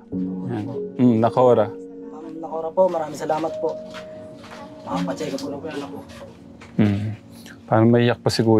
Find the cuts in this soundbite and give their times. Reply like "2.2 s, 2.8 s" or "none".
none